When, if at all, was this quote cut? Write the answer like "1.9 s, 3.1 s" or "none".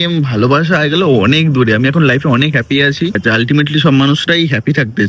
3.2 s